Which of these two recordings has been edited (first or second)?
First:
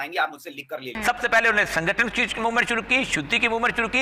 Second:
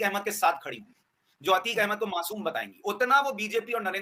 first